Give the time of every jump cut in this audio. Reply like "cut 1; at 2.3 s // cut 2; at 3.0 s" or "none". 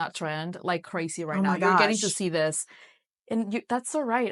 none